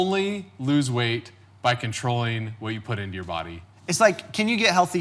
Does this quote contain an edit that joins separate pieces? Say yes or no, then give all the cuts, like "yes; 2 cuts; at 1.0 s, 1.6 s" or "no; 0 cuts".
yes; 1 cut; at 3.7 s